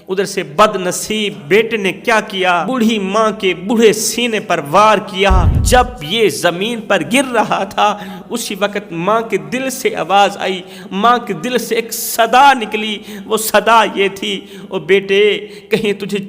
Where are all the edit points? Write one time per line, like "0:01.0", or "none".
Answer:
0:01.4
0:02.7
0:05.5